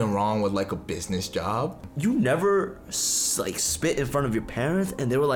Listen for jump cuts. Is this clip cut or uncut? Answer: cut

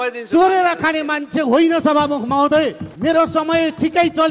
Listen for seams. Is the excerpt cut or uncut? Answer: cut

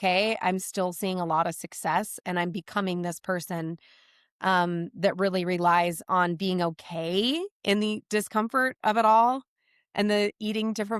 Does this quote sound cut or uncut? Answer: uncut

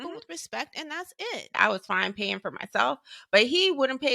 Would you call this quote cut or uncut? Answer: cut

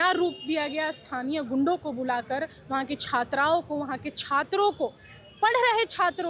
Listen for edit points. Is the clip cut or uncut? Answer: uncut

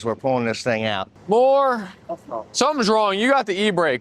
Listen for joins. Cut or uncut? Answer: cut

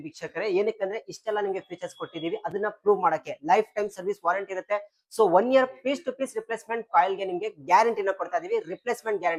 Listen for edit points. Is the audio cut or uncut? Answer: uncut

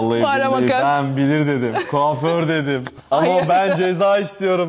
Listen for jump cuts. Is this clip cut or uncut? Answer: cut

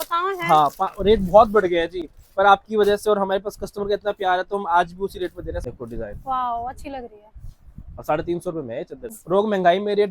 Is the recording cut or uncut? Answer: cut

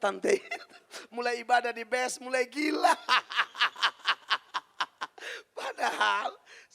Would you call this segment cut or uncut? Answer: uncut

